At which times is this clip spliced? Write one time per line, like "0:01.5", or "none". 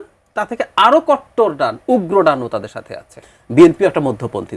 0:03.1